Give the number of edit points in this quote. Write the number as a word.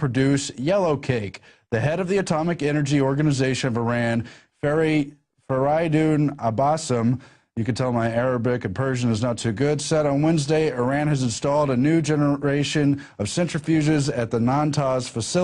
one